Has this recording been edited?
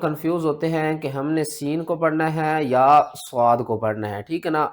no; 0 cuts

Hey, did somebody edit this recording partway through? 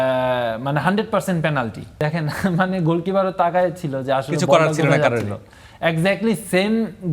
yes; 1 cut; at 1.8 s

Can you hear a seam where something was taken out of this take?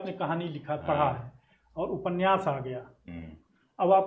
no; 0 cuts

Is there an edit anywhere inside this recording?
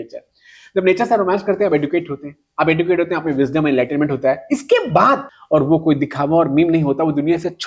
yes; 1 cut; at 5.3 s

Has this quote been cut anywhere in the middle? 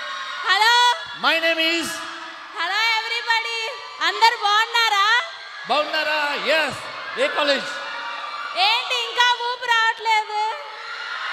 no; 0 cuts

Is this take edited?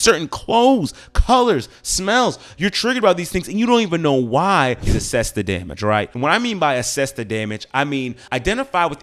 yes; 1 cut; at 4.8 s

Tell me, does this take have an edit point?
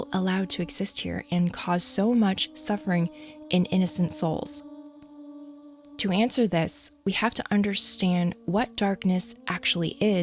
yes; 2 cuts; at 4.5 s, 6.0 s

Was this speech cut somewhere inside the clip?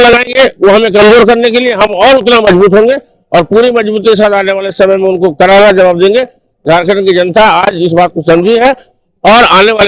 no; 0 cuts

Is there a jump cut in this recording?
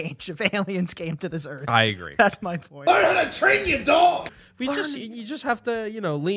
yes; 1 cut; at 2.7 s

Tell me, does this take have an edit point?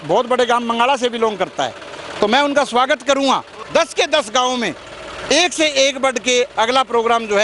yes; 1 cut; at 3.6 s

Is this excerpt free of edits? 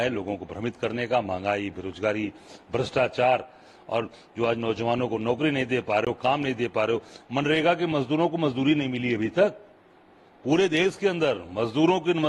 yes; 0 cuts

